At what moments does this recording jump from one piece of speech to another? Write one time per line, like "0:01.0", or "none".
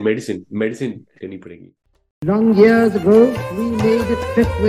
0:01.4